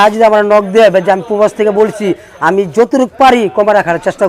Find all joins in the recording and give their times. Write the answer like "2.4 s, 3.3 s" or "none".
none

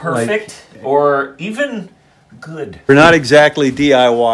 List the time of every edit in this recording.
2.9 s

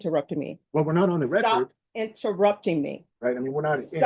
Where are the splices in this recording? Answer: 3.0 s

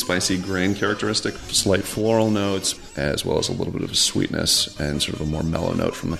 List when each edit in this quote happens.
1.4 s, 2.8 s

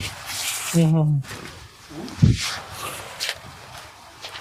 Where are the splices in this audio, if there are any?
none

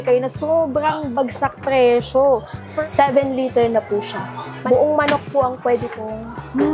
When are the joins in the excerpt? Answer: 2.7 s

